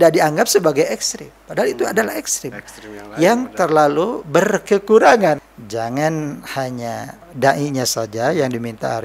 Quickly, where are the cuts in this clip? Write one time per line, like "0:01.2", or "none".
0:05.4
0:07.2